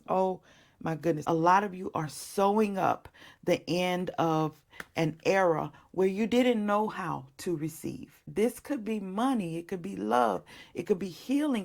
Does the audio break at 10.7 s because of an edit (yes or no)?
no